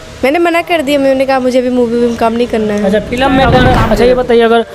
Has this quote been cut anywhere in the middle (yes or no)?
yes